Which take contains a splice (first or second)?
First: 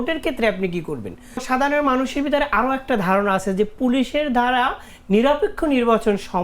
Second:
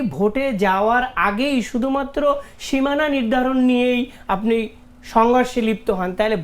first